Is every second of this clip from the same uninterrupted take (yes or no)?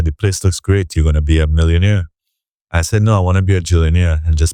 yes